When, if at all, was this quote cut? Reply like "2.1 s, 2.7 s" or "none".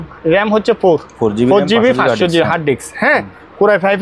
none